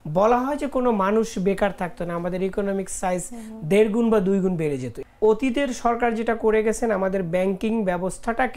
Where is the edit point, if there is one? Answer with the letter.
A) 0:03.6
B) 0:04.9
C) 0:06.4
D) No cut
B